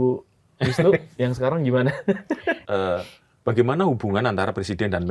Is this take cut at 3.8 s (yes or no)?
no